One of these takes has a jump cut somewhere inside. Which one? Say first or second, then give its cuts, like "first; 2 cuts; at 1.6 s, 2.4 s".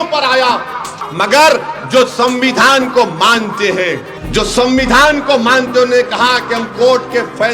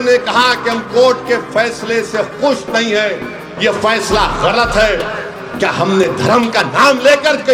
first; 2 cuts; at 1.0 s, 4.1 s